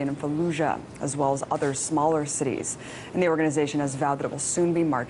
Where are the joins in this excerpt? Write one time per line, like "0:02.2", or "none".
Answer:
0:01.8